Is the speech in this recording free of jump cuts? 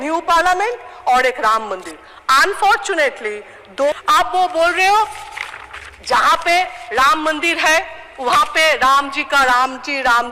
no; 1 cut; at 3.9 s

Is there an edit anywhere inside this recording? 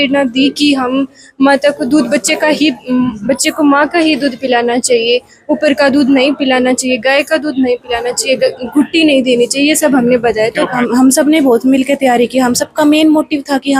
yes; 1 cut; at 10.7 s

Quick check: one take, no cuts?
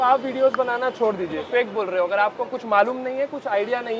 no; 1 cut; at 1.5 s

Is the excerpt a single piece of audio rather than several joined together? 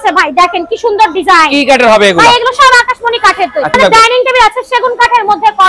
no; 1 cut; at 3.7 s

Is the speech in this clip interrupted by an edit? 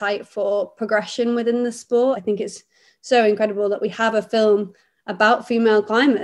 yes; 1 cut; at 2.2 s

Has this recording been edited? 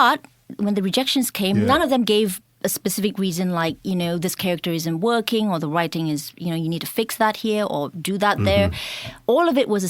yes; 1 cut; at 1.6 s

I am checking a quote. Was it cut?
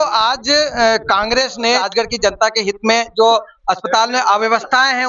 yes; 1 cut; at 1.8 s

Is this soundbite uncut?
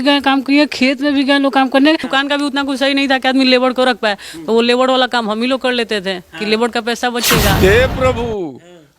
no; 2 cuts; at 2.1 s, 7.5 s

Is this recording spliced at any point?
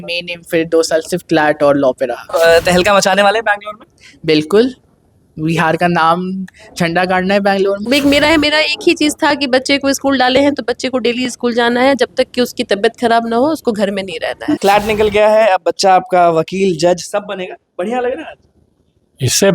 yes; 3 cuts; at 2.3 s, 7.8 s, 14.6 s

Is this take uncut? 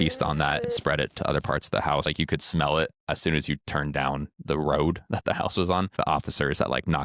no; 3 cuts; at 2.1 s, 3.0 s, 5.9 s

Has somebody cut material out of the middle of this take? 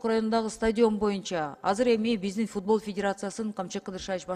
no; 0 cuts

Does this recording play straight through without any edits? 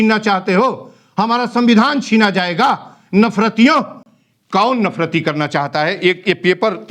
yes; 0 cuts

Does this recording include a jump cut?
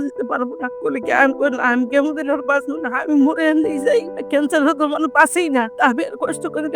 no; 0 cuts

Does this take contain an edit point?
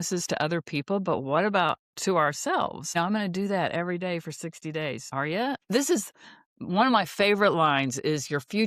yes; 2 cuts; at 2.8 s, 5.6 s

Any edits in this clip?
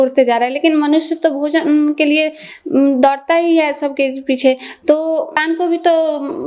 no; 0 cuts

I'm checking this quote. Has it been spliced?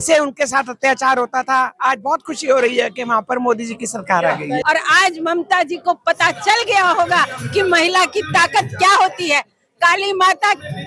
yes; 1 cut; at 4.6 s

